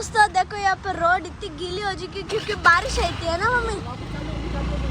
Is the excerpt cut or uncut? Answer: uncut